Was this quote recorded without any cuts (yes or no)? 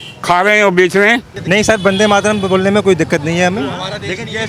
no